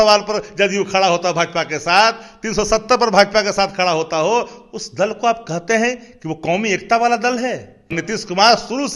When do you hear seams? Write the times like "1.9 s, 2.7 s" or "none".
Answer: 8.0 s